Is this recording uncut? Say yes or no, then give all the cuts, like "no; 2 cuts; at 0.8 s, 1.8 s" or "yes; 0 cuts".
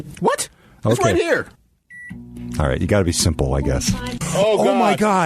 no; 2 cuts; at 1.5 s, 4.2 s